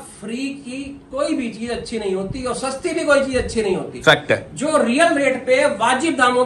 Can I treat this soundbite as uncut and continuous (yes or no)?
yes